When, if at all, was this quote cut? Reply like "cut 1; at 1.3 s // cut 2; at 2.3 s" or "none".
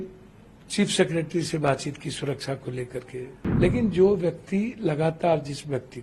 cut 1; at 3.4 s